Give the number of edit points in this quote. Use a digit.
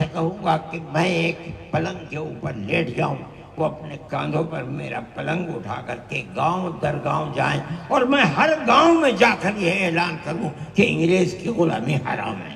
0